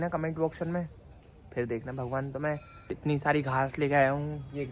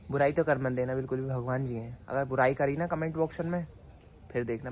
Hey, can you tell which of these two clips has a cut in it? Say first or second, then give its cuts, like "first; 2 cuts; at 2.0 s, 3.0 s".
first; 1 cut; at 2.9 s